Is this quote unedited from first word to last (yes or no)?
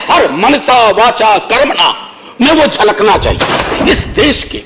no